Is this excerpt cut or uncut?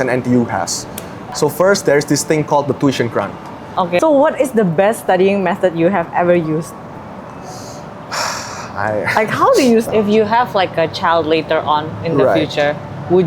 cut